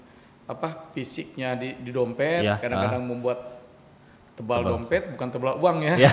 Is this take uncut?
yes; 0 cuts

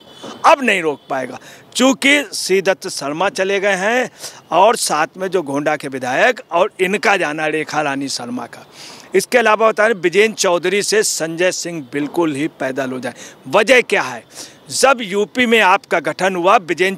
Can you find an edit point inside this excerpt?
no; 0 cuts

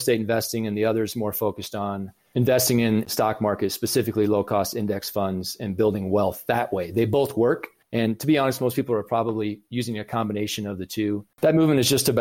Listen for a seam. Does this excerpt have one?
yes; 2 cuts; at 7.8 s, 11.3 s

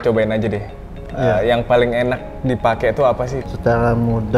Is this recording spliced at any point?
yes; 1 cut; at 3.5 s

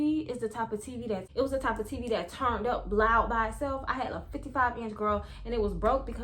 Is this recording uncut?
no; 1 cut; at 1.3 s

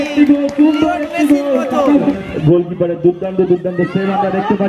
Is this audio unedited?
no; 1 cut; at 2.1 s

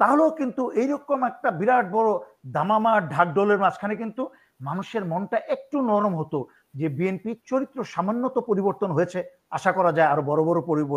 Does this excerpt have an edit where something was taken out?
no; 0 cuts

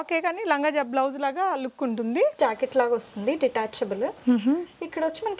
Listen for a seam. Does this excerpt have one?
yes; 1 cut; at 2.4 s

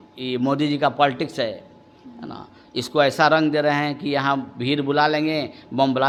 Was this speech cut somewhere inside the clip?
no; 0 cuts

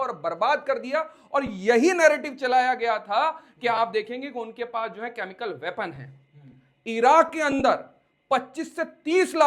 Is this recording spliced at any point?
no; 0 cuts

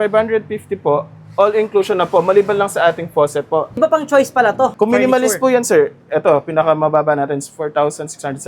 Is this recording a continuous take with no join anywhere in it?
no; 2 cuts; at 3.8 s, 4.7 s

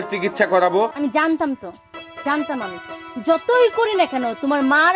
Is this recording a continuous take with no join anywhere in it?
no; 1 cut; at 0.9 s

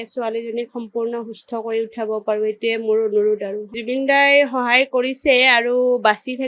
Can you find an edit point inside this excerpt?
yes; 1 cut; at 3.7 s

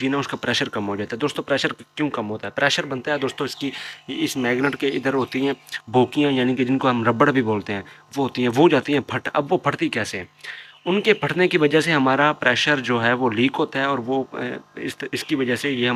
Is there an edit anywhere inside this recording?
no; 0 cuts

